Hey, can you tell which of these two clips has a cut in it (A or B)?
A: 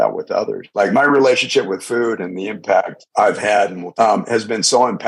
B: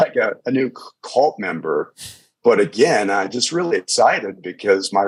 A